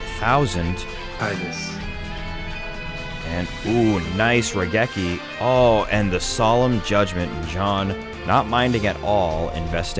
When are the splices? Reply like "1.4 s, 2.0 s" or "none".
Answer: 1.1 s

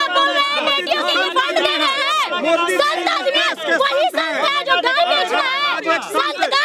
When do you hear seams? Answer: none

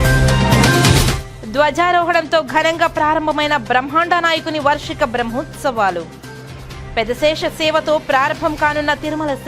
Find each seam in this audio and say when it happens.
1.2 s

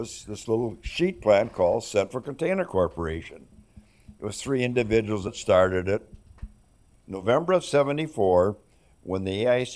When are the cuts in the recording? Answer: 5.2 s, 7.0 s

